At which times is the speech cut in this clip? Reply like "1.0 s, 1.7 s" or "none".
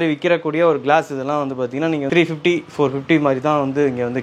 2.1 s